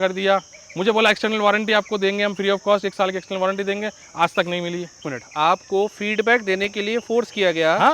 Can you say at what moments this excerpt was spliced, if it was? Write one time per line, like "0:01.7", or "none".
0:05.1